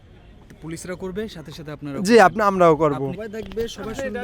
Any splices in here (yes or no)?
yes